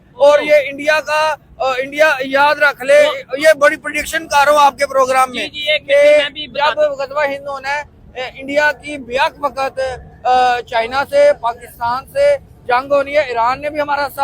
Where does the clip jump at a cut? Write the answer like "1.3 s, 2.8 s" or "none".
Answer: none